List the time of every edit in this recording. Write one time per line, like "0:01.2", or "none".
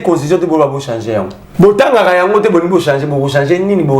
0:01.4

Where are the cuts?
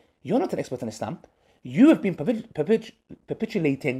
none

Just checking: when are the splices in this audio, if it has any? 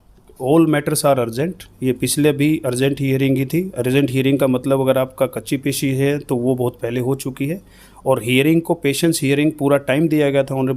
none

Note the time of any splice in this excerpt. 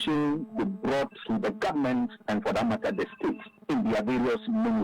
0:01.2

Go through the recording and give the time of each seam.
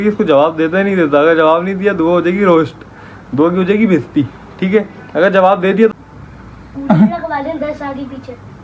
0:04.5
0:05.9

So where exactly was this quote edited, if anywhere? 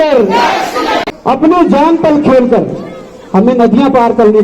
0:01.1

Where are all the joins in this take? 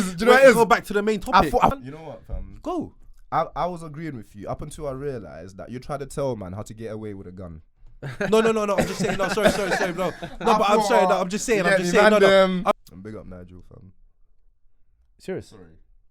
0:01.8
0:12.8

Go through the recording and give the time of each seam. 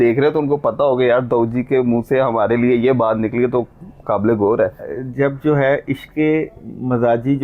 0:04.9

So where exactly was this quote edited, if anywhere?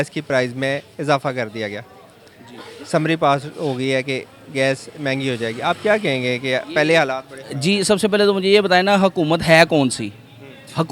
none

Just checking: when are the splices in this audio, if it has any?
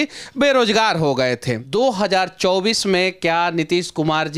0:01.6

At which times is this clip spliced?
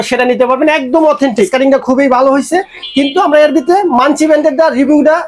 0:01.5

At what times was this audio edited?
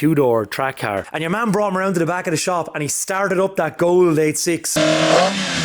0:01.1
0:04.8

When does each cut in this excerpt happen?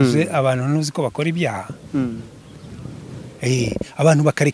none

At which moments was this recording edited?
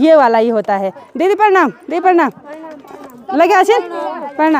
none

